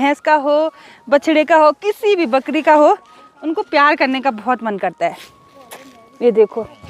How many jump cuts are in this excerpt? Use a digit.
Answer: 0